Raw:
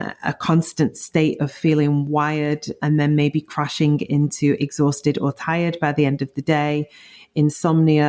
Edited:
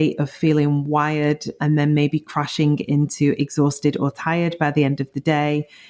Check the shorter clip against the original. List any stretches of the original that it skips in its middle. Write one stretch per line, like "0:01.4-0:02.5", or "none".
none